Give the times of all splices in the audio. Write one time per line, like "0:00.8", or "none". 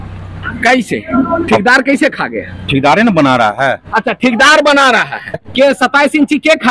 0:05.4

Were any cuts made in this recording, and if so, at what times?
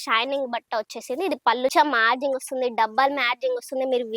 0:01.7

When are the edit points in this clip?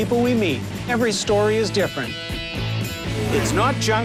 none

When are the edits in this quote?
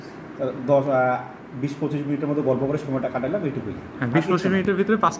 none

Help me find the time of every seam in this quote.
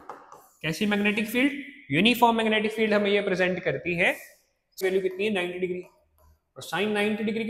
0:04.8

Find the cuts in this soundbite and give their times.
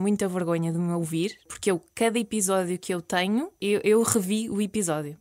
0:01.5
0:03.6

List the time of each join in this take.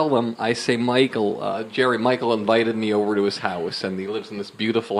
none

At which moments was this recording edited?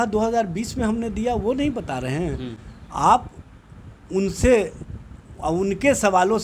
none

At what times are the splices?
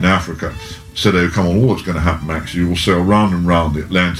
none

